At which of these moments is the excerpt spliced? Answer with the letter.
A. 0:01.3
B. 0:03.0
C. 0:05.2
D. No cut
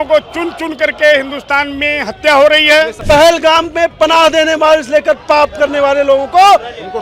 B